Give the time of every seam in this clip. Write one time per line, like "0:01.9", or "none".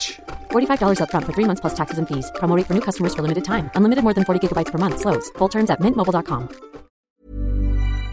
0:07.0